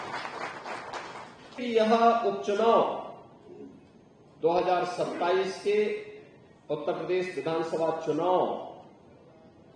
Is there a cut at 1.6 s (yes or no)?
yes